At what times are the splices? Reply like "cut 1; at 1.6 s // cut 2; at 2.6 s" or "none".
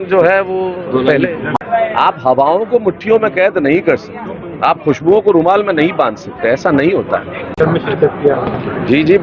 cut 1; at 1.5 s // cut 2; at 7.6 s